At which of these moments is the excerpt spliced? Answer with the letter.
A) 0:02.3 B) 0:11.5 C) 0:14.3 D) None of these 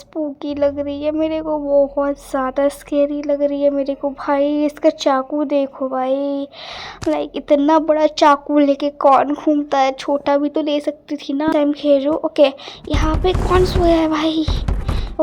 B